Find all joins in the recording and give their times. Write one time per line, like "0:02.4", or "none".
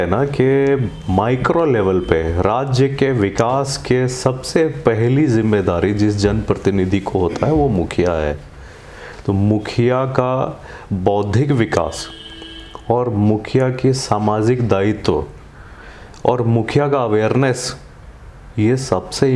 none